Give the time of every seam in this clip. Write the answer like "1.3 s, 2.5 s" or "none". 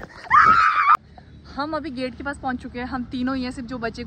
1.1 s